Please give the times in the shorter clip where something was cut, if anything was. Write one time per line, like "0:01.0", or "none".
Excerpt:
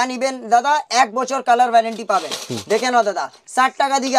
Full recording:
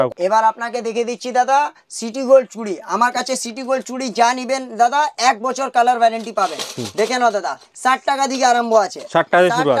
none